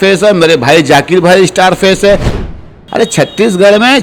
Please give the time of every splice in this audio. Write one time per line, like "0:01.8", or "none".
0:02.5

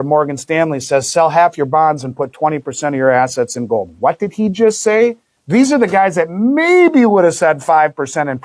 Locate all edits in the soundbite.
0:05.3

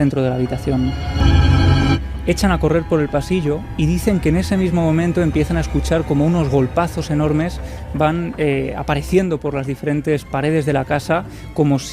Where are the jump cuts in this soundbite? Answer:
0:02.1

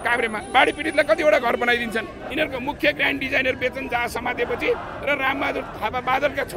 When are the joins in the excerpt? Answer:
0:02.2

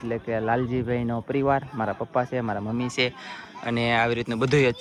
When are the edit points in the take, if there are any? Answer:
none

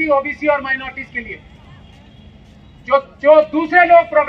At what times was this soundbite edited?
none

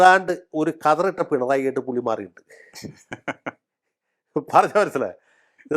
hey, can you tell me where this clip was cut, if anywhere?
none

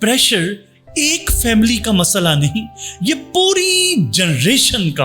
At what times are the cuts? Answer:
none

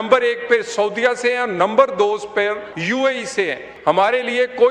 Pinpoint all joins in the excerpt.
0:02.7
0:03.7

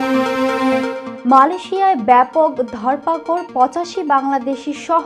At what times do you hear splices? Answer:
0:01.0

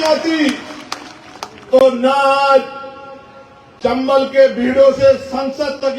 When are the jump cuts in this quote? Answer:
none

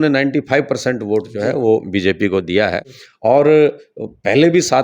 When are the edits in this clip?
none

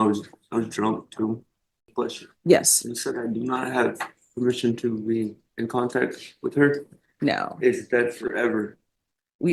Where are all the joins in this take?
0:01.9

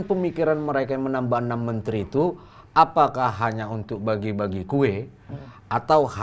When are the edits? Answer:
none

